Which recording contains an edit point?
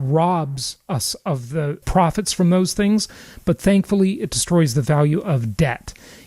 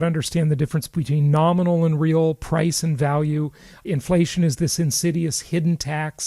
first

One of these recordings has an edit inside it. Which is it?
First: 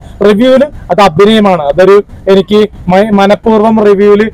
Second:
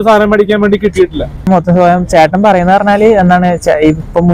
second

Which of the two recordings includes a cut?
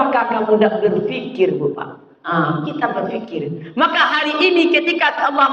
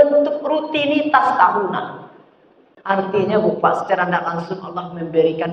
second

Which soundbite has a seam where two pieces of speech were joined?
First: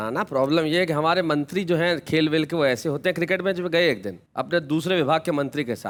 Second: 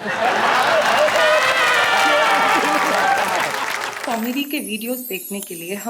second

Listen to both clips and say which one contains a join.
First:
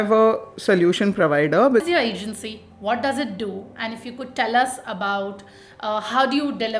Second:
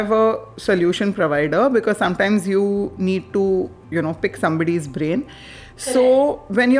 first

